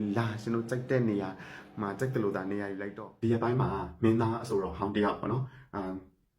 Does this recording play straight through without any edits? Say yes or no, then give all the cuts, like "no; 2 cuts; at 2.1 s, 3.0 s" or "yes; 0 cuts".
no; 1 cut; at 2.8 s